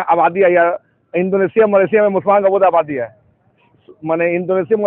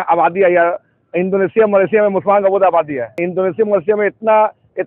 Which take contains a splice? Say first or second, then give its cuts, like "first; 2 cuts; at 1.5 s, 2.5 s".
second; 1 cut; at 3.2 s